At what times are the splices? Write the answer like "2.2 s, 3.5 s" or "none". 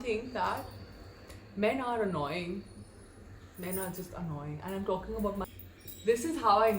5.4 s